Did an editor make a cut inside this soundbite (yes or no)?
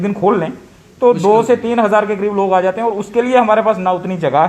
no